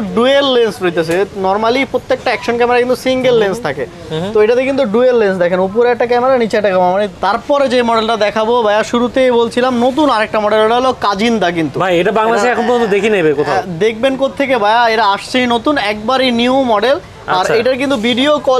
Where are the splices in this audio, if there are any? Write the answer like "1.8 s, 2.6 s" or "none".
6.9 s